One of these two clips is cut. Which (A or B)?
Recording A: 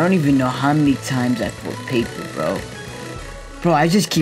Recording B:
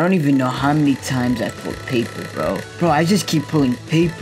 B